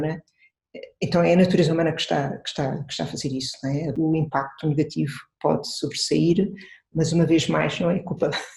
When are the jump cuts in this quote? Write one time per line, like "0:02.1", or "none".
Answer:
0:03.9